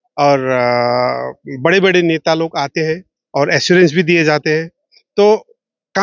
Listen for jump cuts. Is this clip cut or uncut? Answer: uncut